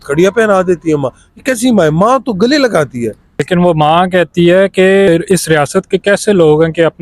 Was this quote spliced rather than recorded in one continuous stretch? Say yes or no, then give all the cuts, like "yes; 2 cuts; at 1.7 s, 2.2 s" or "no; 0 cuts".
yes; 2 cuts; at 3.4 s, 5.1 s